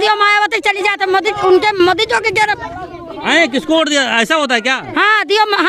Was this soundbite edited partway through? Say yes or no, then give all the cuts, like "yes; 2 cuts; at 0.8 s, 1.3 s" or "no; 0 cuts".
no; 0 cuts